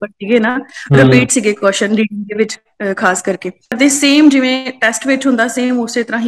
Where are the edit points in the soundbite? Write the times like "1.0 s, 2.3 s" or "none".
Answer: 3.8 s